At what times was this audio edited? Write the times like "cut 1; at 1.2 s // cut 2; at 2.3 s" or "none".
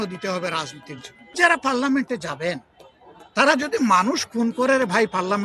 cut 1; at 1.4 s